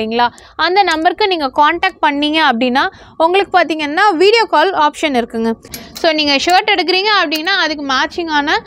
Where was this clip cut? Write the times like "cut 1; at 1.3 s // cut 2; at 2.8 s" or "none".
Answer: cut 1; at 5.7 s

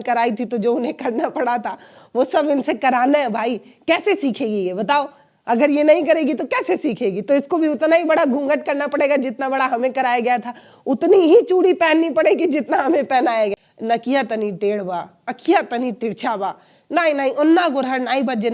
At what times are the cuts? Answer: cut 1; at 13.5 s

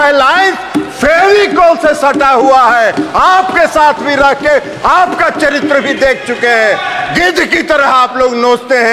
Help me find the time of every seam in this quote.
none

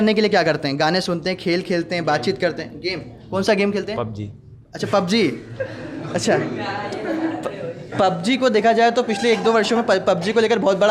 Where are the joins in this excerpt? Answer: none

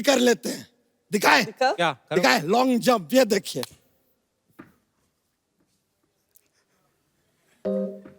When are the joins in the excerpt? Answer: none

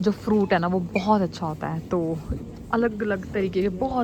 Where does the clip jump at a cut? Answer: none

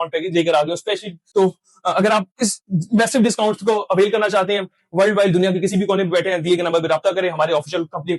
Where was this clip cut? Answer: cut 1; at 1.2 s

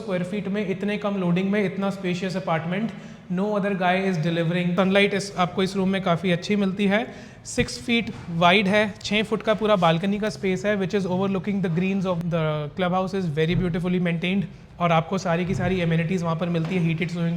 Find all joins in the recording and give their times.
cut 1; at 4.7 s // cut 2; at 12.2 s

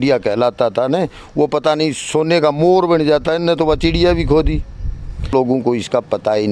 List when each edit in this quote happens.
cut 1; at 5.3 s

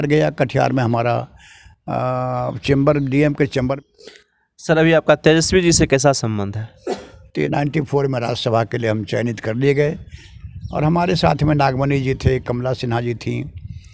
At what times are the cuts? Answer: cut 1; at 3.8 s // cut 2; at 7.5 s

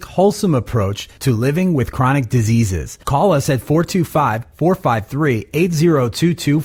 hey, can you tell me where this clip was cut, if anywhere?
none

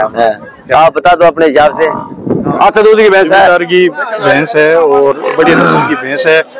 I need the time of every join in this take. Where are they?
cut 1; at 2.5 s

